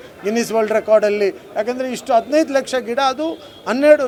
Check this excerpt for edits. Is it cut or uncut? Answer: uncut